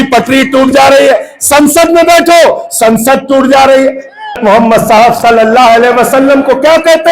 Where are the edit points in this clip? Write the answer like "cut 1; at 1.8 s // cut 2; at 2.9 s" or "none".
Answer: cut 1; at 4.4 s